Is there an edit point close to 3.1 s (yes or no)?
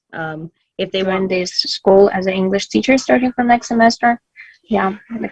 no